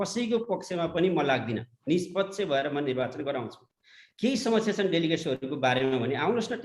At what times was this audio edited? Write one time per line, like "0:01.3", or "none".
none